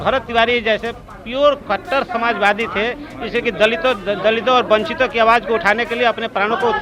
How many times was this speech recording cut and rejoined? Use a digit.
0